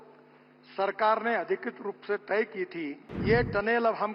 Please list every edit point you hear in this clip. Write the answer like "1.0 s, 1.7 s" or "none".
3.1 s